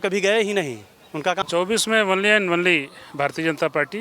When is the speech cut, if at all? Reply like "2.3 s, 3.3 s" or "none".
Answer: 1.4 s